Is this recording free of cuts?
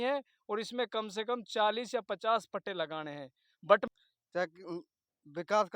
no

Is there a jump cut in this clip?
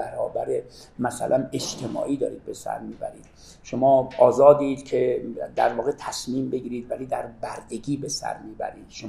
no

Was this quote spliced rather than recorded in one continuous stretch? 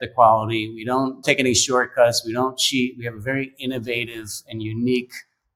yes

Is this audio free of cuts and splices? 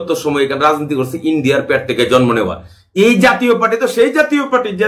yes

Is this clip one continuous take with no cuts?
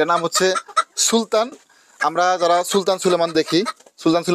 yes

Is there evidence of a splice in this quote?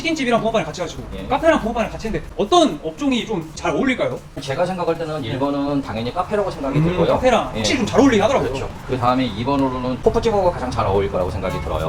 no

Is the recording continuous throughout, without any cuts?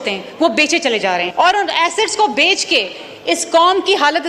no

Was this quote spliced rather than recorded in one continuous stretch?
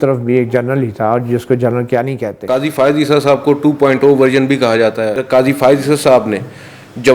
yes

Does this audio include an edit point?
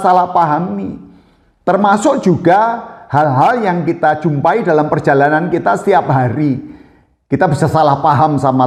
no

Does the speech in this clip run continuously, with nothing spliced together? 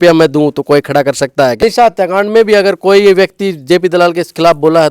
no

